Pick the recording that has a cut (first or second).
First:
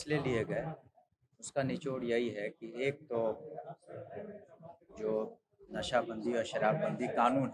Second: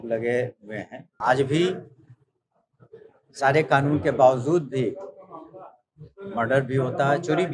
second